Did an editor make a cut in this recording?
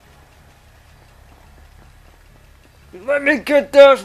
yes; 1 cut; at 2.9 s

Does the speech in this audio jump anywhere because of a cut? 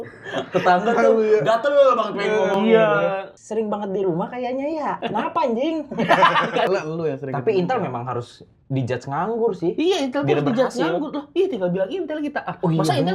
yes; 3 cuts; at 3.4 s, 5.0 s, 6.7 s

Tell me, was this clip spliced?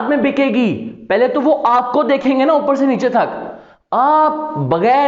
no; 0 cuts

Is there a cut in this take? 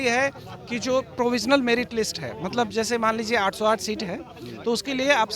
no; 0 cuts

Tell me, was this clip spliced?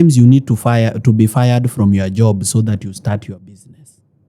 no; 0 cuts

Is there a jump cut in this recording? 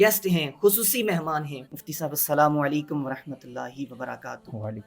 yes; 1 cut; at 1.6 s

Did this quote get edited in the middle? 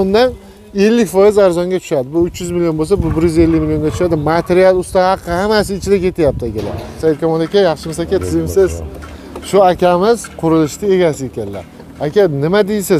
yes; 1 cut; at 6.9 s

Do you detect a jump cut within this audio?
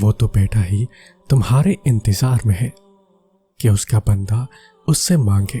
no; 0 cuts

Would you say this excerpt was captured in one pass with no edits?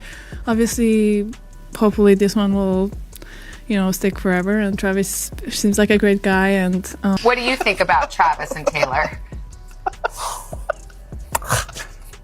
no; 1 cut; at 7.2 s

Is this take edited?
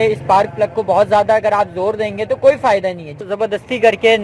yes; 1 cut; at 3.2 s

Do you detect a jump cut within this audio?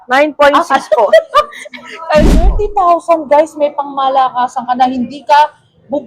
yes; 1 cut; at 2.3 s

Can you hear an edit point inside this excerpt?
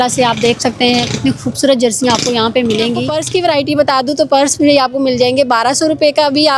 yes; 1 cut; at 3.2 s

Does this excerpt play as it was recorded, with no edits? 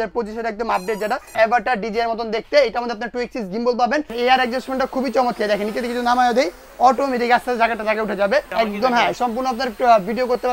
no; 3 cuts; at 1.3 s, 4.1 s, 8.5 s

